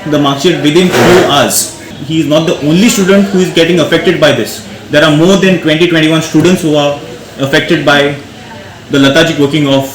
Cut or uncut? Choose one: cut